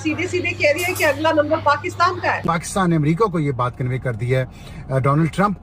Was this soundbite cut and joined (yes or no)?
yes